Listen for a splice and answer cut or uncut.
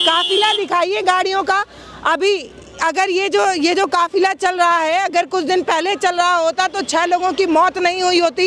uncut